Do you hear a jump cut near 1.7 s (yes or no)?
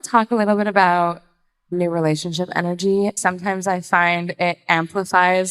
yes